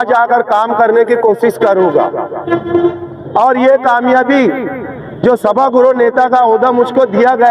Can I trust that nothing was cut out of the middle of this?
yes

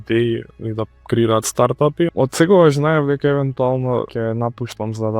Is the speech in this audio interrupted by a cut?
yes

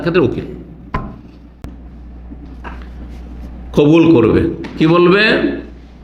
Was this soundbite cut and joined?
yes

